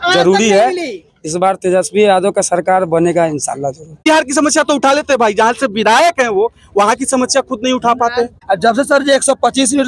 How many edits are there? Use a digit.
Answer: 2